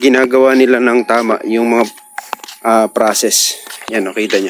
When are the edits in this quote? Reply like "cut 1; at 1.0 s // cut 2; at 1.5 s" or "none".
none